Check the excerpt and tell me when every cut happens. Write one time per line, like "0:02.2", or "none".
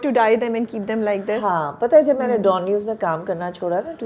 none